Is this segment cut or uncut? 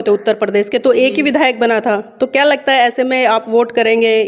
uncut